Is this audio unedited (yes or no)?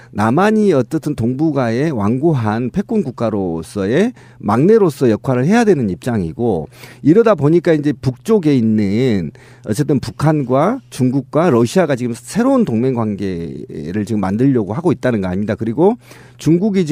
yes